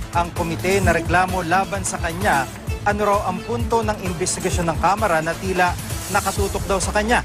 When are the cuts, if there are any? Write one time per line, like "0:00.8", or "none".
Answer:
0:01.7